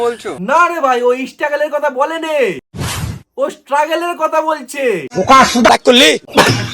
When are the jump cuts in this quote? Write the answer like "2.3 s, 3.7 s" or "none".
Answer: 5.7 s